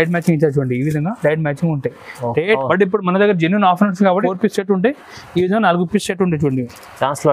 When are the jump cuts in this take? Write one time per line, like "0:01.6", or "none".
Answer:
0:02.6
0:04.3